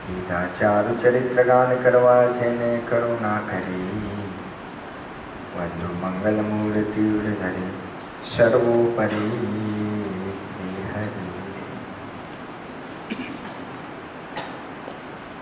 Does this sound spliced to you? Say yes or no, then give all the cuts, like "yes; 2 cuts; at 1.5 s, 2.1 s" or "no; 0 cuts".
yes; 1 cut; at 13.9 s